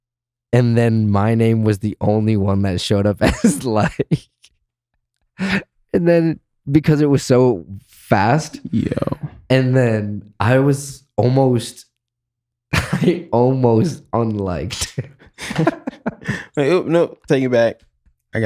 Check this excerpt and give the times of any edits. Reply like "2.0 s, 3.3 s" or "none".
none

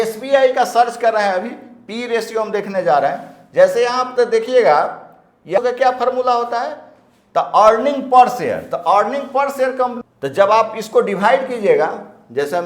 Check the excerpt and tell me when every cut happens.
5.6 s, 10.0 s

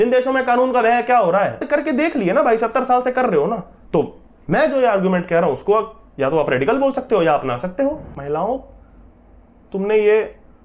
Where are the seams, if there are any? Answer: 1.6 s, 8.1 s

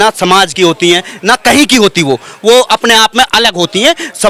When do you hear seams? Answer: none

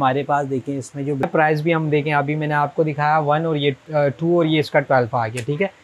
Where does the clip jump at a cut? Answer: 1.2 s

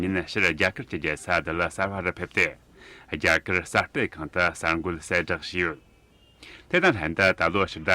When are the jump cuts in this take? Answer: 6.6 s

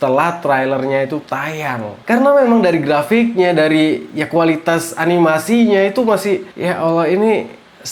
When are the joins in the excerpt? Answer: none

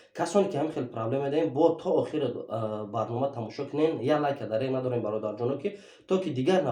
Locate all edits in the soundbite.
none

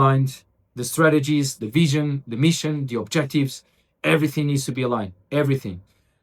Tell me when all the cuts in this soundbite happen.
none

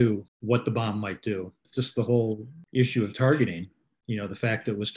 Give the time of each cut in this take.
2.5 s

